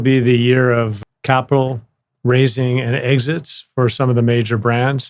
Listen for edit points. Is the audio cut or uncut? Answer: cut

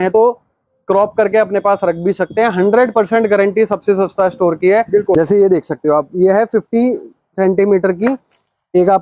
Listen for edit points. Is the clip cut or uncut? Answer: cut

